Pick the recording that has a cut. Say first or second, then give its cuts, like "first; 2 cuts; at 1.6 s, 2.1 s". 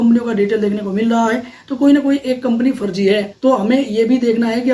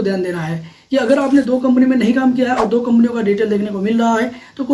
first; 1 cut; at 3.3 s